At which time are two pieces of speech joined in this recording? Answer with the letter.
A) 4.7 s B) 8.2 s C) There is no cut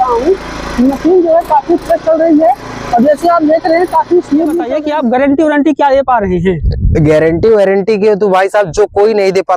A